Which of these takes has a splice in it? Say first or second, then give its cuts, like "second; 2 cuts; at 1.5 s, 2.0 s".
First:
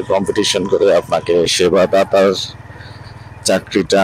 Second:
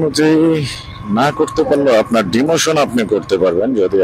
first; 1 cut; at 1.5 s